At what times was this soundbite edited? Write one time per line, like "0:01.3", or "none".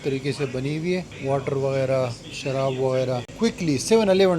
0:01.1
0:03.3